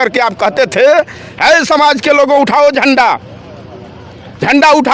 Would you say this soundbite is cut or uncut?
uncut